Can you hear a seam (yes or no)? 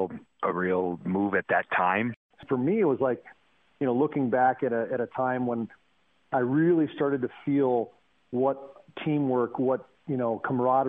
yes